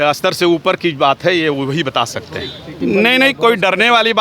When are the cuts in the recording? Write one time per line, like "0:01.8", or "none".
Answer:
0:02.7